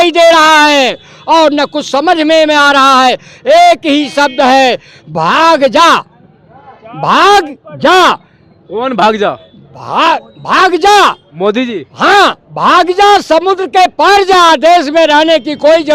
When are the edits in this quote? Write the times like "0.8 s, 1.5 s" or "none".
none